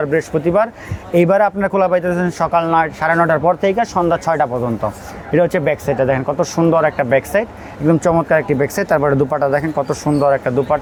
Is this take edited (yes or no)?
no